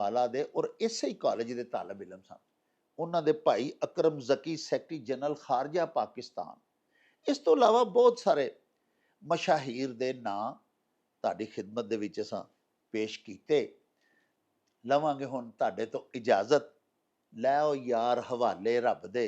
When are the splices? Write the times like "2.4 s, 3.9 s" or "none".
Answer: none